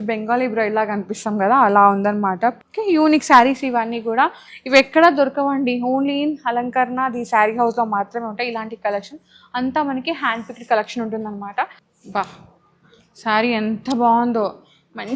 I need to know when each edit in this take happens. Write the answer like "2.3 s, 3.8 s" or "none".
2.7 s, 11.8 s